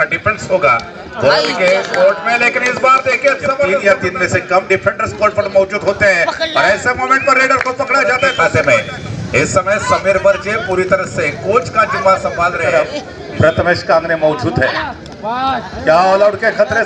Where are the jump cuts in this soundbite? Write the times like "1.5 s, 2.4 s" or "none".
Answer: 3.8 s, 8.3 s, 12.7 s